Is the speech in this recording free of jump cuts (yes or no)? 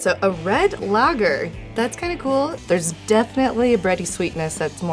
no